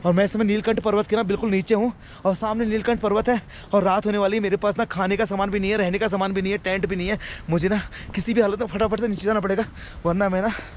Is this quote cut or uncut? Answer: uncut